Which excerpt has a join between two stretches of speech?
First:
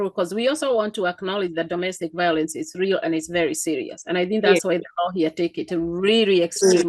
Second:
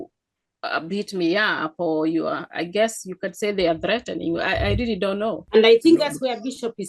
second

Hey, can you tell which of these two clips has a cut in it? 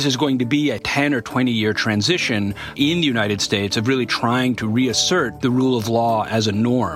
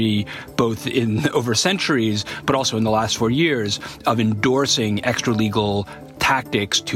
first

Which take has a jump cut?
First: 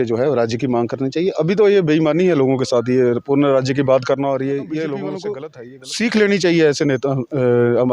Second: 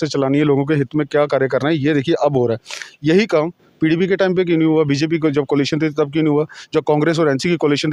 first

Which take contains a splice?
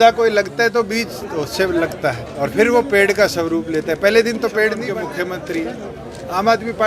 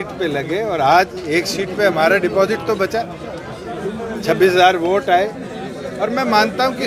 first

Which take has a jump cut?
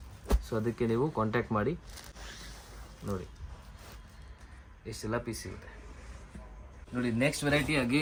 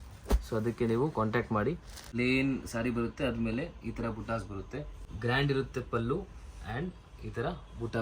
second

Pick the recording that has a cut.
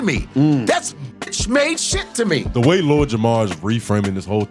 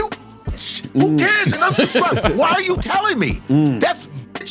first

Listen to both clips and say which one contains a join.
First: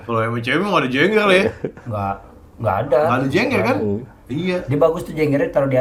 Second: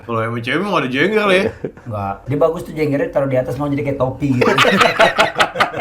second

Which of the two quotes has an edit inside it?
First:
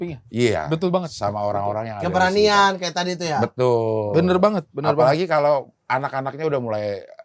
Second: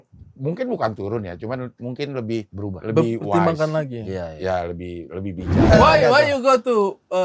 second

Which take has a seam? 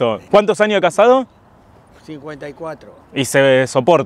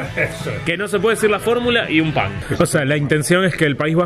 second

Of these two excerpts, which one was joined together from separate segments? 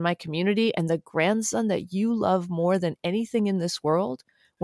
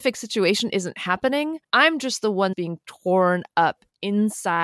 second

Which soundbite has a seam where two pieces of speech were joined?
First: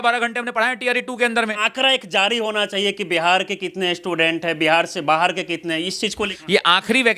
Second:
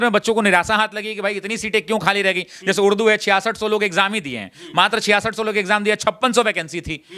first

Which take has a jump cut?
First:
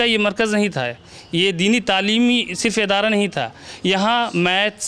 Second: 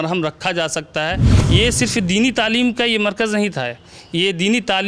second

